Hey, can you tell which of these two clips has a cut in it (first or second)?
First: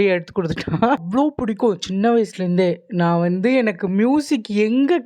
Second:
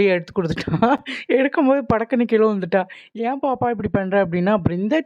first